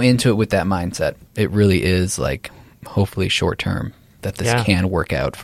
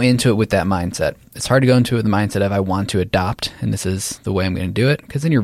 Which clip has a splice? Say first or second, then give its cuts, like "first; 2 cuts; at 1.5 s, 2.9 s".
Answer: first; 1 cut; at 1.2 s